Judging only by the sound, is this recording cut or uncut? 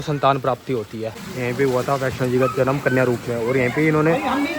cut